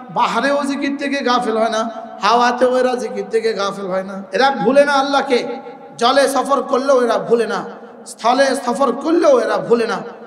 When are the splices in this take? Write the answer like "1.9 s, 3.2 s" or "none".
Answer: 4.2 s